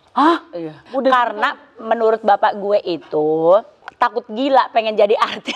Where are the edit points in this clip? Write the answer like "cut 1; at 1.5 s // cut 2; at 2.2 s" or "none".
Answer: cut 1; at 0.9 s // cut 2; at 3.8 s